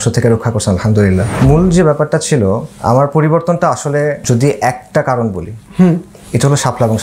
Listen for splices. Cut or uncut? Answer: cut